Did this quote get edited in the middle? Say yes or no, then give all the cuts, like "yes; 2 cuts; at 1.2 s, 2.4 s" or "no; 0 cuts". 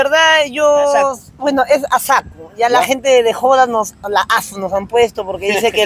no; 0 cuts